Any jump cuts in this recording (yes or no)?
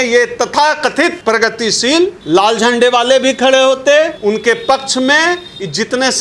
yes